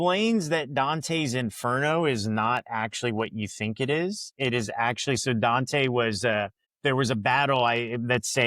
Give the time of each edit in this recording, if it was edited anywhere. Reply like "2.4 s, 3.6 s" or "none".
6.6 s